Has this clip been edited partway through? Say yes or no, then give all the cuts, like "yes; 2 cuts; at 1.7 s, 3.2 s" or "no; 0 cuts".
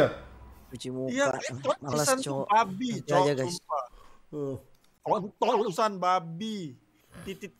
no; 0 cuts